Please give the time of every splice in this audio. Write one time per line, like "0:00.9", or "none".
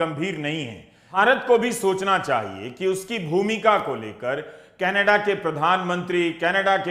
0:01.2